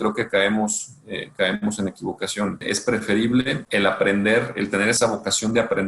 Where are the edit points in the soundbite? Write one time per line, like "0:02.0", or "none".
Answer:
0:02.6
0:03.6
0:05.0